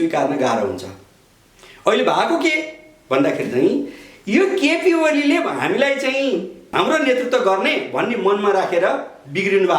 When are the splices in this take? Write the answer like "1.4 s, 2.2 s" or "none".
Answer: 6.6 s